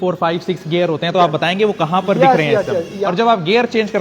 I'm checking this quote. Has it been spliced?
yes; 1 cut; at 3.0 s

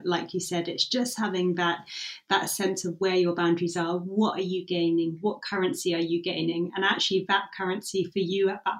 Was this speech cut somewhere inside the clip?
no; 0 cuts

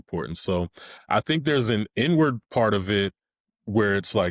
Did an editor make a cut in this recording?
no; 0 cuts

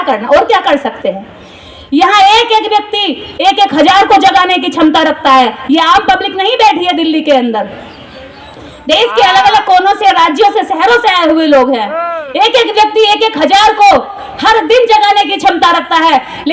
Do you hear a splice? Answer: no; 0 cuts

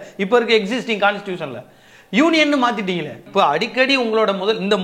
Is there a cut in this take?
yes; 1 cut; at 3.2 s

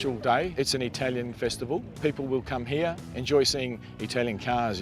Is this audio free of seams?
no; 2 cuts; at 1.9 s, 3.1 s

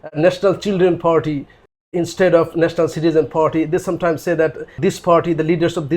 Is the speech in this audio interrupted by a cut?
yes; 1 cut; at 4.8 s

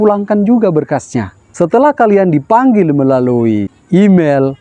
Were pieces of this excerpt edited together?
yes; 2 cuts; at 1.4 s, 3.7 s

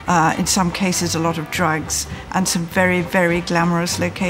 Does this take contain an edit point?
no; 0 cuts

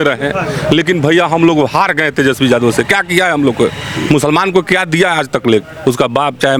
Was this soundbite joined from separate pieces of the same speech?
no; 0 cuts

